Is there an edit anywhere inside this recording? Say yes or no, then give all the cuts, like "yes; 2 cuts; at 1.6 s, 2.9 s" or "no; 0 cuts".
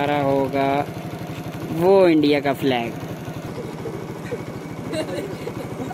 yes; 1 cut; at 3.5 s